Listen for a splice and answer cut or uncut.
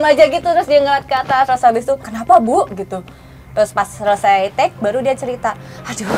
cut